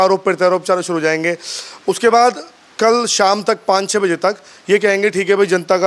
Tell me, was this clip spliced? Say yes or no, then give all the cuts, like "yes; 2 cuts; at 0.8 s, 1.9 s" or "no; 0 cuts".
no; 0 cuts